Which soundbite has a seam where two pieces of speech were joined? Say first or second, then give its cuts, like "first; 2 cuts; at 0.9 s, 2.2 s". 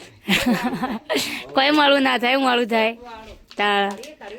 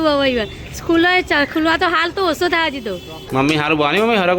second; 1 cut; at 3.3 s